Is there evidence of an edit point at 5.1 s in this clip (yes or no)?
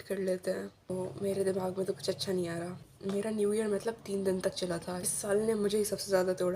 yes